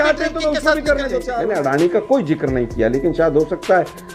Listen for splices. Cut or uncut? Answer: cut